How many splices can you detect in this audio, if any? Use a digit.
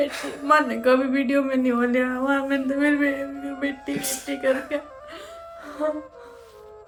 0